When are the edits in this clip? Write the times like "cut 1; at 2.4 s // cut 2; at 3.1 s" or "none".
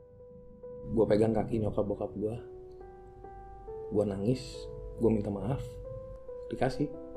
cut 1; at 5.9 s